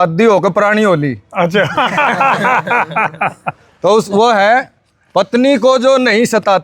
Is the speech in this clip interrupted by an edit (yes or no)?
no